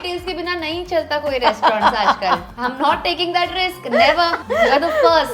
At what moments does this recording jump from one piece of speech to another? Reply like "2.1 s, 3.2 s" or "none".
2.5 s, 4.4 s